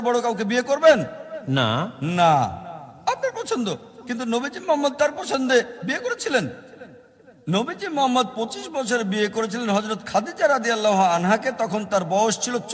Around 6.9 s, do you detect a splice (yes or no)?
no